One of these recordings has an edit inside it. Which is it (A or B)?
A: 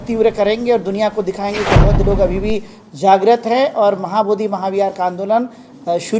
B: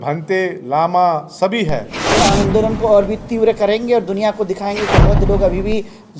B